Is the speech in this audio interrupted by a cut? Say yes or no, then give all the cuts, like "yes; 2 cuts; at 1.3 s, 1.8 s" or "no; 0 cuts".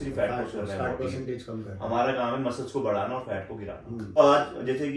no; 0 cuts